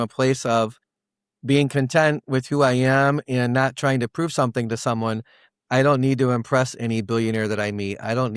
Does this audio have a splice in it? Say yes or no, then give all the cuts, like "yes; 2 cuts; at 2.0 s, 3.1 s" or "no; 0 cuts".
no; 0 cuts